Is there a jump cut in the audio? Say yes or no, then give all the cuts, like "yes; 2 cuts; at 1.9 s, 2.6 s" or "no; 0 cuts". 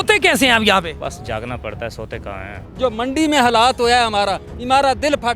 yes; 2 cuts; at 1.0 s, 2.6 s